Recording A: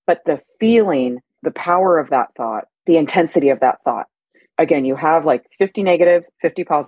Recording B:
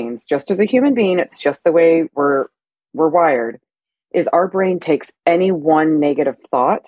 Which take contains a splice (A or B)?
A